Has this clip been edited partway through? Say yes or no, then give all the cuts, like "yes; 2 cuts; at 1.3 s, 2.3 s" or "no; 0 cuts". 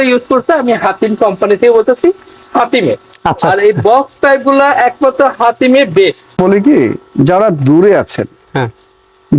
yes; 1 cut; at 6.4 s